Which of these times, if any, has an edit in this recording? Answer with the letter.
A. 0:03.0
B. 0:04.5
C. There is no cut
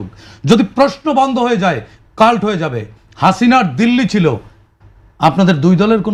C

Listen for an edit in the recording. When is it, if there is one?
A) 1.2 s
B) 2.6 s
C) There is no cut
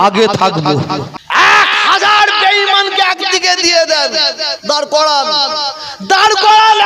A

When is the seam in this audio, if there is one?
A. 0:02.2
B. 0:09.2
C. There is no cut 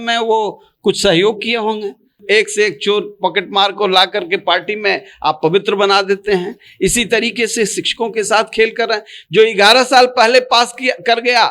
A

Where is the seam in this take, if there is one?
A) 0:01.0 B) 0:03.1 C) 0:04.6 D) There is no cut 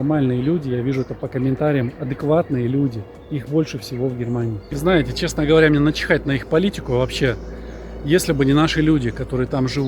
C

